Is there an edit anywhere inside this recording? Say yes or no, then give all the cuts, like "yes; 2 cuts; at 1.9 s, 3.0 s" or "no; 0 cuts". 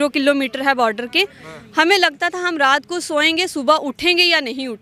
no; 0 cuts